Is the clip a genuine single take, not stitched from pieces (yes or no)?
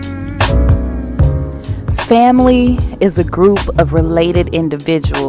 no